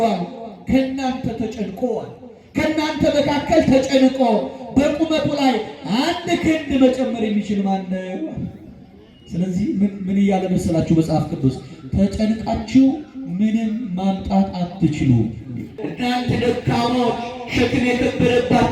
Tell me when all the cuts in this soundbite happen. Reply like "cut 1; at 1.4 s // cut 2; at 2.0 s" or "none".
cut 1; at 15.8 s